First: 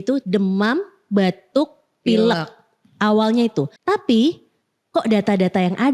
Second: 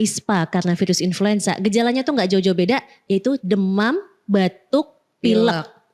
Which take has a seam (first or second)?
first